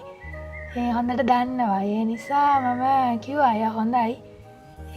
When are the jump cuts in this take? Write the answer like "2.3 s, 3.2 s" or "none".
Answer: none